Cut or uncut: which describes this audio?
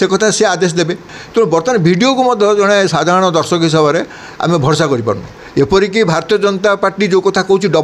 cut